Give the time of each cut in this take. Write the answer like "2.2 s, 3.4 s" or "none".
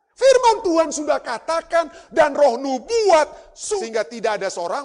3.5 s